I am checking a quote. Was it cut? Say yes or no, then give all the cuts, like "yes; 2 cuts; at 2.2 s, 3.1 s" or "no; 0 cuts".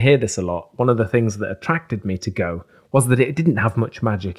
no; 0 cuts